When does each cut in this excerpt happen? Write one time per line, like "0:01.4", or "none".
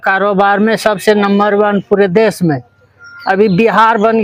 none